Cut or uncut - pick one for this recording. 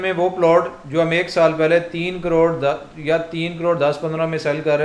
uncut